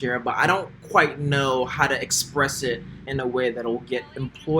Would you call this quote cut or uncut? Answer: cut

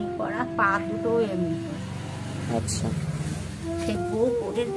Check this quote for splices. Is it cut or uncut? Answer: uncut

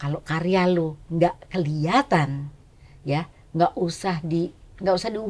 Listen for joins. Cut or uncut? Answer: uncut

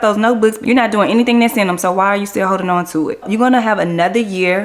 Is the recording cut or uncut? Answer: cut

